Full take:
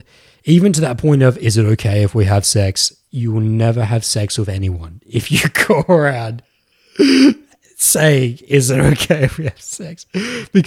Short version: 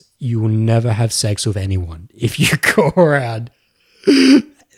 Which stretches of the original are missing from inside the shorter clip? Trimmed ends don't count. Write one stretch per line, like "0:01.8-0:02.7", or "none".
none